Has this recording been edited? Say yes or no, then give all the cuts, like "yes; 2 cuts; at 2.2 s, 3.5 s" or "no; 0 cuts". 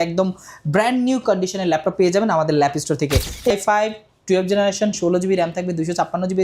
yes; 1 cut; at 3.5 s